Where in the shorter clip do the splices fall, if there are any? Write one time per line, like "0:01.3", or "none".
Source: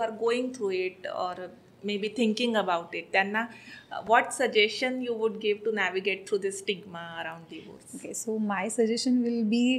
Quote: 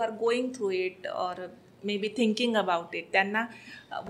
none